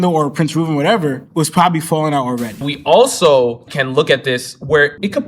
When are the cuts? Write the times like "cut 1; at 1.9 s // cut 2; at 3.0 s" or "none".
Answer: cut 1; at 2.6 s

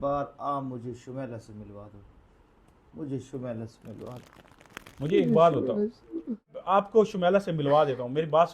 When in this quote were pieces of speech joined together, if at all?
cut 1; at 6.6 s

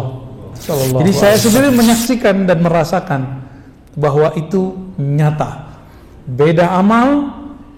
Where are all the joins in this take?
cut 1; at 1.0 s

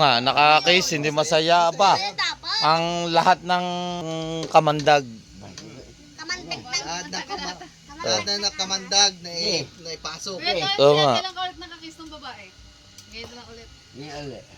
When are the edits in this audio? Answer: cut 1; at 4.0 s

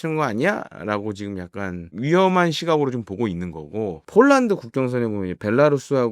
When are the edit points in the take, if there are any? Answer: cut 1; at 1.9 s // cut 2; at 4.0 s

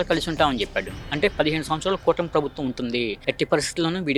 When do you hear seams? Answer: none

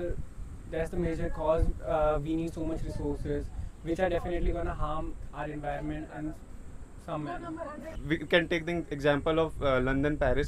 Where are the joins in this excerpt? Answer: cut 1; at 7.9 s

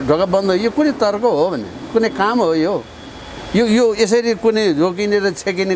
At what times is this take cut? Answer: none

